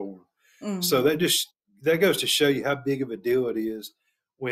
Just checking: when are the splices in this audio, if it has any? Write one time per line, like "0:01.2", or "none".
none